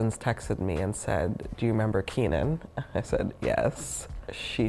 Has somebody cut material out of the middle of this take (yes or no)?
yes